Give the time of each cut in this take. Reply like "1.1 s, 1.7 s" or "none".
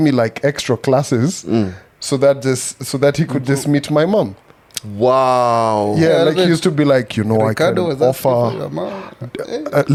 none